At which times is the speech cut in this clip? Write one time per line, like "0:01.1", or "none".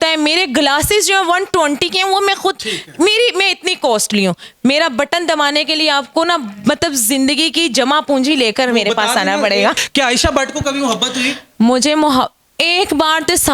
0:09.8